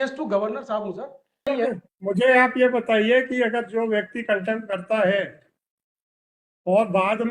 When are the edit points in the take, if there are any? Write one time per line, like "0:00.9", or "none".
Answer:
0:01.5